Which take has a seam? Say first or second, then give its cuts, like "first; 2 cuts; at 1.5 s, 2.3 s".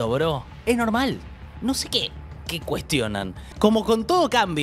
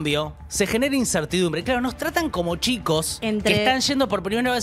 first; 1 cut; at 3.4 s